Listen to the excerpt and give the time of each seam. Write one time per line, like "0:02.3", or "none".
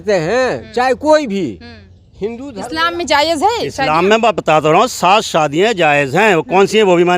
0:02.5